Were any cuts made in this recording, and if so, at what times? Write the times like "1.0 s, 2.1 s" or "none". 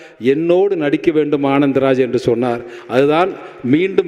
none